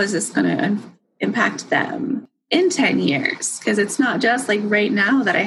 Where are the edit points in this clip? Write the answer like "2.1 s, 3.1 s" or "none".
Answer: 2.3 s